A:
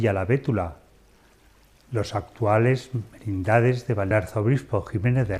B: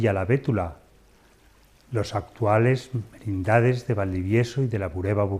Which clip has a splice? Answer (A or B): B